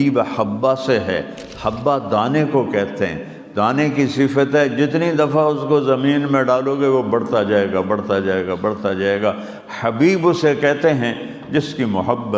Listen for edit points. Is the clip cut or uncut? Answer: uncut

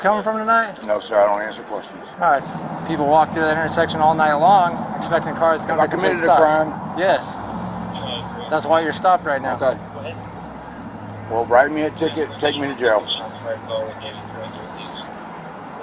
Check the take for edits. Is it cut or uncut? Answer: cut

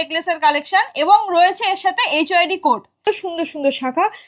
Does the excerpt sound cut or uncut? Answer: cut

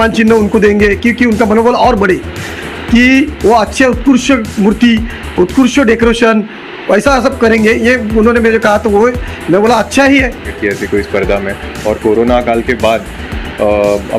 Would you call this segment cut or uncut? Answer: cut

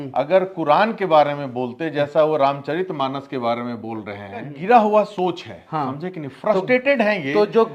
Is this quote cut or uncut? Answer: cut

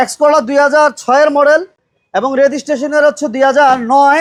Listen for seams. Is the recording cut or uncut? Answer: uncut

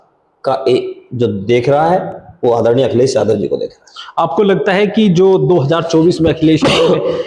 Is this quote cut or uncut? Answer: uncut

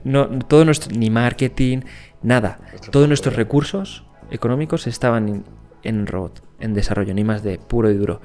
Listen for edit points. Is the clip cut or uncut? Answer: uncut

